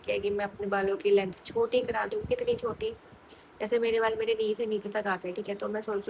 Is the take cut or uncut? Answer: uncut